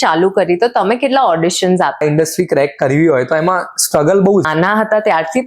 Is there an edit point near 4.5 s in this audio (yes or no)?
yes